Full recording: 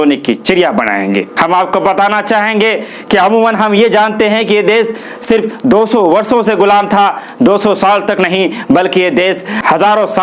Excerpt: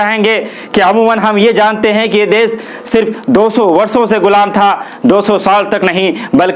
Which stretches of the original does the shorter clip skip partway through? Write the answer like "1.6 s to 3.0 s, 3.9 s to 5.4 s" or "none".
none